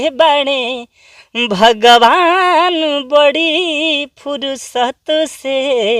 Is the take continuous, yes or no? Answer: yes